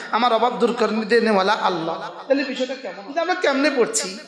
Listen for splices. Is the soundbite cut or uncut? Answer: cut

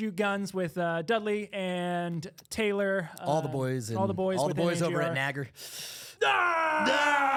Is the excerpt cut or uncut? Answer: uncut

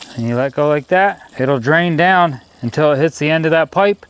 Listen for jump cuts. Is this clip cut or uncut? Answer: cut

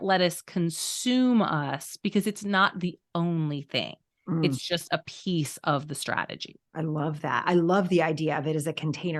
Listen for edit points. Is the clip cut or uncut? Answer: uncut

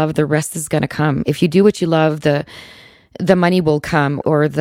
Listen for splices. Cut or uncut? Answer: uncut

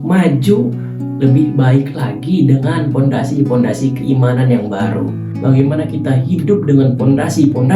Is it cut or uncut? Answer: cut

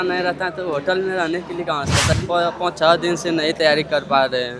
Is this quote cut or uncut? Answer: cut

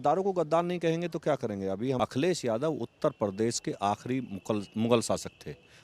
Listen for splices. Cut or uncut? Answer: cut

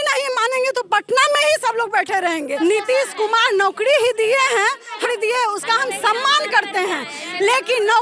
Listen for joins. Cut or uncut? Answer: cut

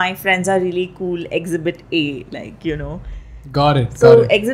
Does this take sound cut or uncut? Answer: uncut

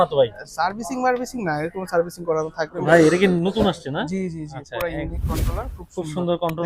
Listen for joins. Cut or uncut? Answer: cut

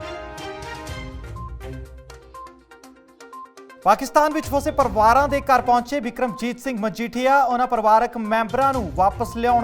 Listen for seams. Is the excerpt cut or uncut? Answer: cut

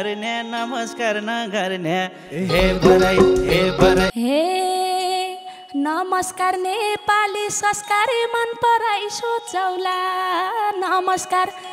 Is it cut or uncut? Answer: cut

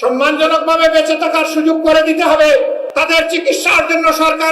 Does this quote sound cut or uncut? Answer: cut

